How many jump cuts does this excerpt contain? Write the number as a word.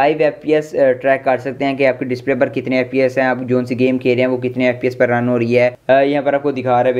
one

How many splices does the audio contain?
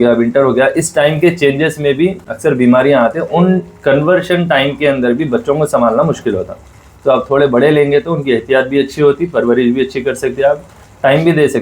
zero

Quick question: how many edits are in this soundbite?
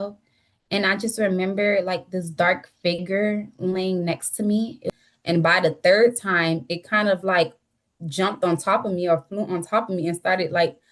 one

